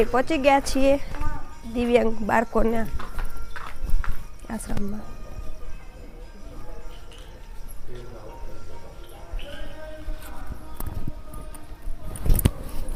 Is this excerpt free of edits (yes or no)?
yes